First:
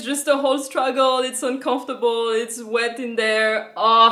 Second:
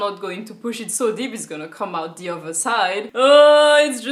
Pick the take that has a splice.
second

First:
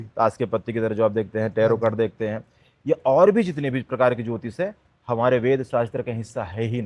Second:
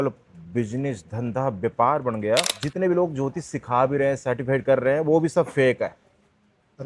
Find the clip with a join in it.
second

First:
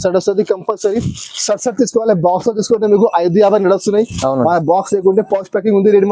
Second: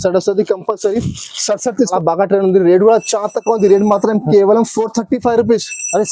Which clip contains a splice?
second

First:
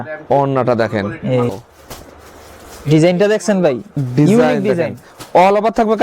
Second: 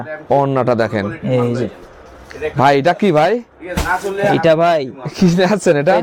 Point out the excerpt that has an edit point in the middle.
first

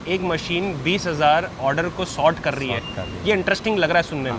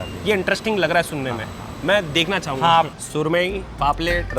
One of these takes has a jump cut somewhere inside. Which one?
second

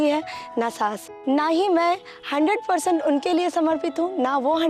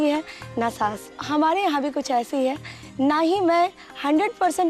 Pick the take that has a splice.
first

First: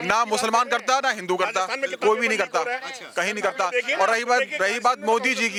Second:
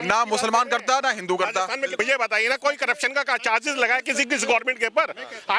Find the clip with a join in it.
second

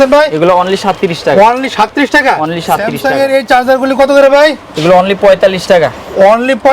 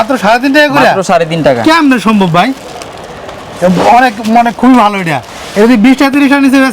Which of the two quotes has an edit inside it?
first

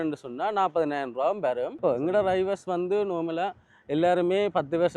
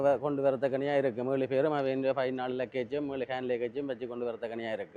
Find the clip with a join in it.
first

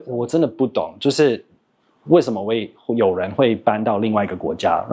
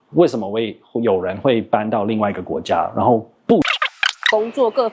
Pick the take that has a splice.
second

